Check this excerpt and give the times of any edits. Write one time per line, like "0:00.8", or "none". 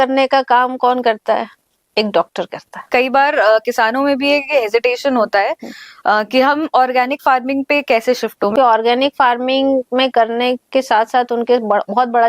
0:02.9
0:08.5